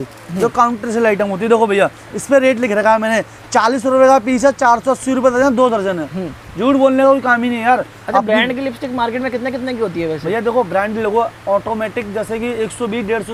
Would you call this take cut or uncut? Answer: uncut